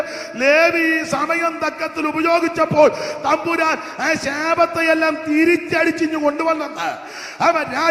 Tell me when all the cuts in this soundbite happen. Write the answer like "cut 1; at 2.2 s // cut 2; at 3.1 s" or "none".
none